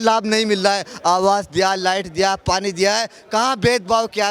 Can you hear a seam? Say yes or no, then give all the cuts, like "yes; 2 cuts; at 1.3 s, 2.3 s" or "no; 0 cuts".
no; 0 cuts